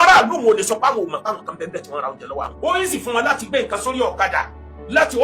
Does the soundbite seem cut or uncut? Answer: cut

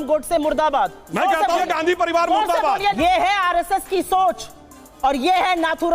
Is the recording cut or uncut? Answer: cut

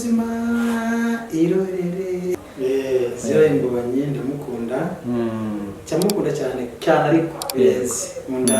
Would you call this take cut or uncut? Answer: cut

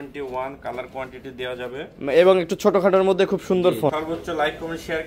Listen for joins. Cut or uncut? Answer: cut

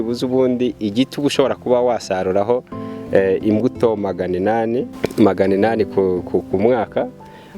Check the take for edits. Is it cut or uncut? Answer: cut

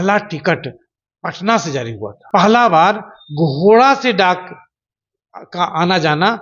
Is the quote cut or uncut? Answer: cut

